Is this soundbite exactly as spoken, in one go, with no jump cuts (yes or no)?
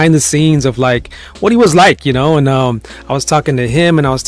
yes